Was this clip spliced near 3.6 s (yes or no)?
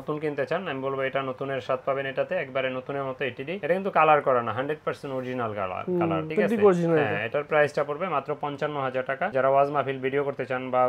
no